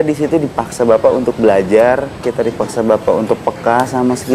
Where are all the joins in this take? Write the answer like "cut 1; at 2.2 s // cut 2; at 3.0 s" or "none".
cut 1; at 2.2 s